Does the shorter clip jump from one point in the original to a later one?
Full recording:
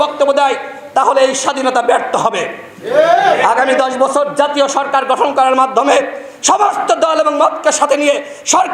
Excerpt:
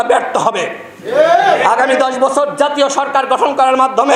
no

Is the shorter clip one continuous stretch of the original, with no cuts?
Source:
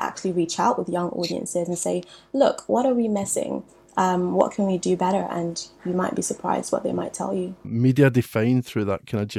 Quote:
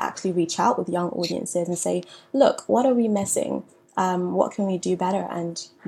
yes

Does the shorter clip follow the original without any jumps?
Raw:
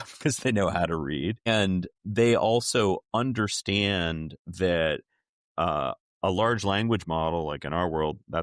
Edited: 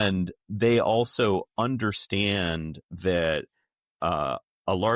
yes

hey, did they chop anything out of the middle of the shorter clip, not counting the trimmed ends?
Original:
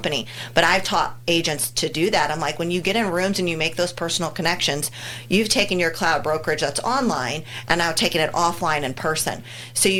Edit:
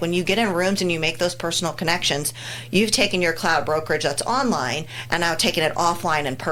no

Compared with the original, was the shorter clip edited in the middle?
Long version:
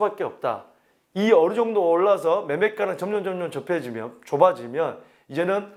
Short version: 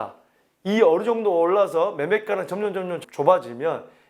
yes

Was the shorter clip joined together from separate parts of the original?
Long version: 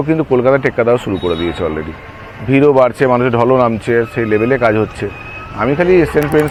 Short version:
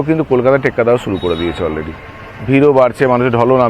no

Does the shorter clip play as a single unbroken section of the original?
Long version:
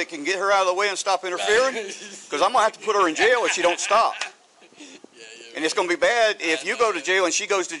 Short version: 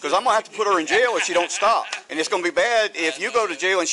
no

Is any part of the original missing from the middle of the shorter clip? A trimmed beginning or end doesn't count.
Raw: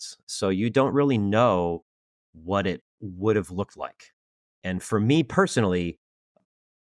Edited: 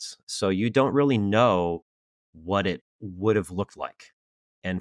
no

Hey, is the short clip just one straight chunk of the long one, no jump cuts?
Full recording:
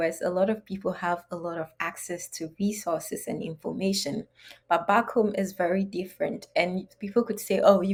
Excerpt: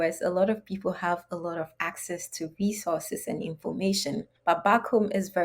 no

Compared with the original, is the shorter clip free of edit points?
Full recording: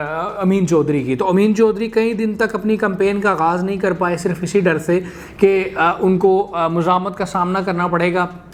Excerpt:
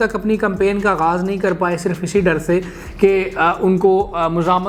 yes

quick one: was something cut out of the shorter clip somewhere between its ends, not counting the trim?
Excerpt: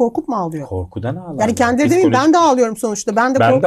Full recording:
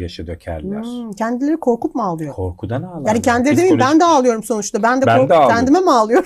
no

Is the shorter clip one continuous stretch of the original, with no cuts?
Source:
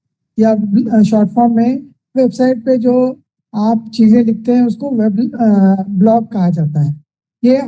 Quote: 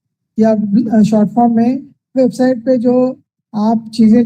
yes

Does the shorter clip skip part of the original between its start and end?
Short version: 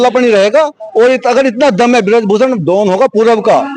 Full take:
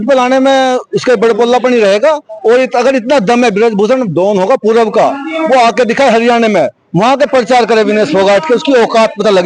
no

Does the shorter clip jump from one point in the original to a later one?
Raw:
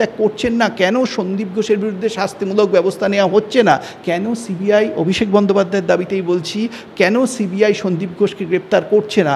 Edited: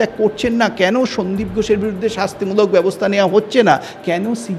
no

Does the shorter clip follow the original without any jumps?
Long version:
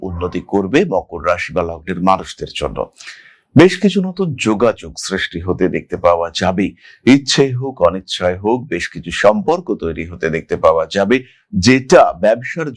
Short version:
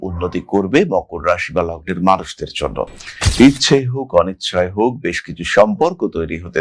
no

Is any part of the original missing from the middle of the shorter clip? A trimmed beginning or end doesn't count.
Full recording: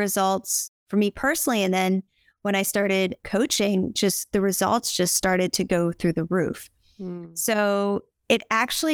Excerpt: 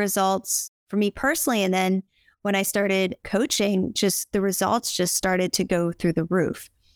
no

